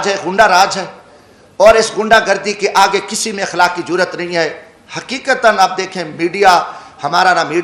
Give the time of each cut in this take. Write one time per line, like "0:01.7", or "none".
none

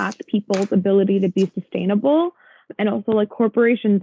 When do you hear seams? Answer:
0:02.8

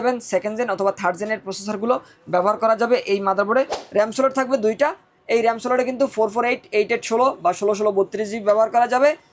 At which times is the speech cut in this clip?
0:03.8

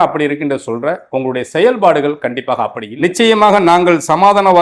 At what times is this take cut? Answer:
0:02.8

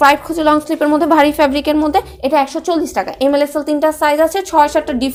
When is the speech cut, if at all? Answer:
none

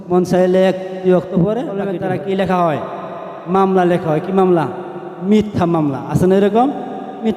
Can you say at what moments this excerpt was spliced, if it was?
0:01.9

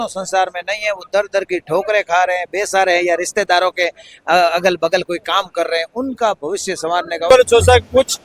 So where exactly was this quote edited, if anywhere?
0:07.3

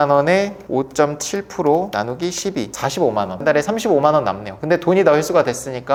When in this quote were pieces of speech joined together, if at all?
none

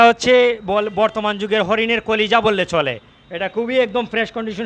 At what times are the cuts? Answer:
none

